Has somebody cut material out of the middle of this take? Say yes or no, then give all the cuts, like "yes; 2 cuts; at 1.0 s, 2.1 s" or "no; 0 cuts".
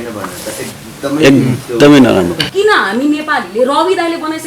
yes; 1 cut; at 2.4 s